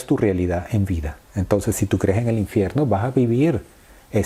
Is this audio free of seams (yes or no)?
no